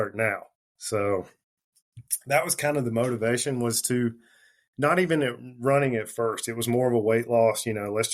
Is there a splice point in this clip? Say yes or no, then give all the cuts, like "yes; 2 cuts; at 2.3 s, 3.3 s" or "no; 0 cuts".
no; 0 cuts